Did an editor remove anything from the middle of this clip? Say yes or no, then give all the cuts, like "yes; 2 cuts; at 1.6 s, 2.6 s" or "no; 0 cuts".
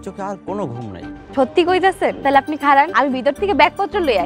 yes; 3 cuts; at 1.2 s, 2.2 s, 2.9 s